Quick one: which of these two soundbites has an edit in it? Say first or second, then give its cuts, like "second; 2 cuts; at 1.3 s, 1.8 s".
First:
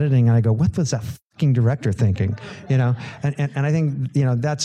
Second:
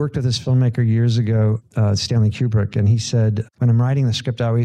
second; 2 cuts; at 1.6 s, 3.5 s